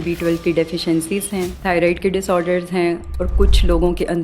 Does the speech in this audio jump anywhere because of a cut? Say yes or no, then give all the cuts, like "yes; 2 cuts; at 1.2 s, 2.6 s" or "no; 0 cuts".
yes; 1 cut; at 1.5 s